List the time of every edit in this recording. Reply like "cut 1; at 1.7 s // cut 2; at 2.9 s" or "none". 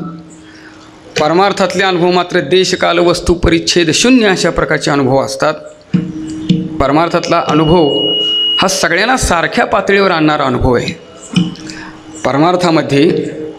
cut 1; at 6.8 s